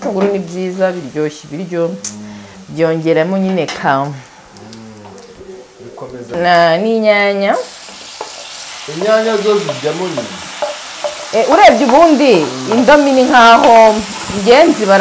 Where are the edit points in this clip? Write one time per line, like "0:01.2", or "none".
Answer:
0:06.2